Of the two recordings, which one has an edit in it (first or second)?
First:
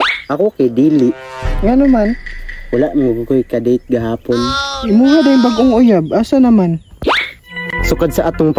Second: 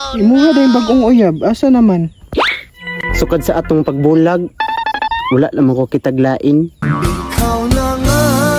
second